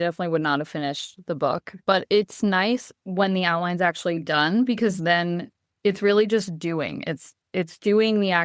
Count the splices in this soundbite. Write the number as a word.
zero